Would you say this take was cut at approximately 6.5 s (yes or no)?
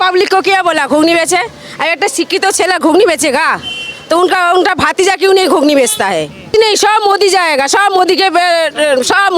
yes